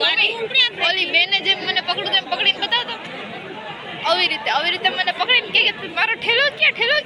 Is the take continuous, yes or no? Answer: yes